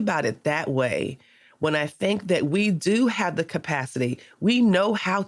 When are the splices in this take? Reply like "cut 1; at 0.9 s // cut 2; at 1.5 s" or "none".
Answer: none